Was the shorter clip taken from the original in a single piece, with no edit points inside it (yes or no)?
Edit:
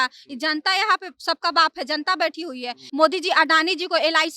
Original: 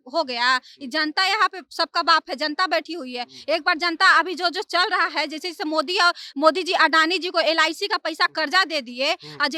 no